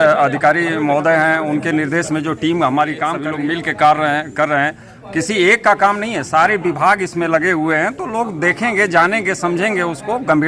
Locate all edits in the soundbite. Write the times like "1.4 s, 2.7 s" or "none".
3.2 s